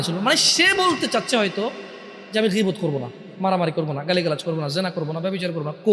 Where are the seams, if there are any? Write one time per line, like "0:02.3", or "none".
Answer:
none